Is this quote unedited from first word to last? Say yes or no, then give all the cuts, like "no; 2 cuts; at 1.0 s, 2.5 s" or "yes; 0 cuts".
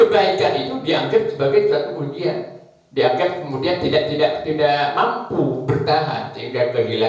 yes; 0 cuts